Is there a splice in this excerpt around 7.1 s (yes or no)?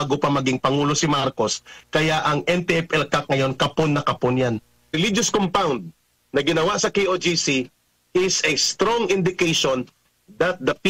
no